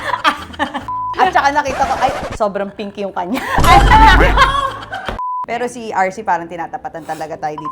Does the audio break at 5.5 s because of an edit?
yes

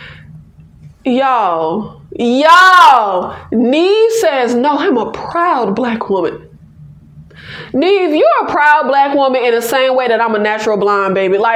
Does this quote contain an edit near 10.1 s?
no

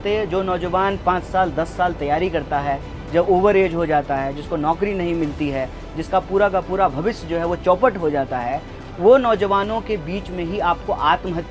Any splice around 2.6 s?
no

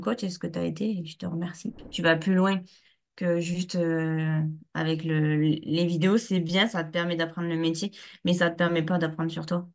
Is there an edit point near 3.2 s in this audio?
no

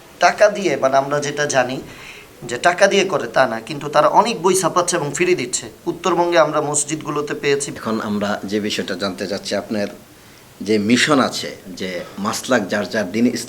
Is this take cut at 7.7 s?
yes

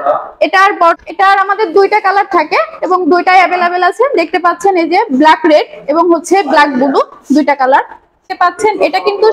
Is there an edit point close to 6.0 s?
no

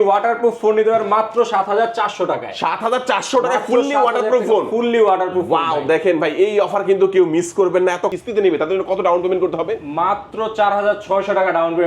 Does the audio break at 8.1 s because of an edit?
yes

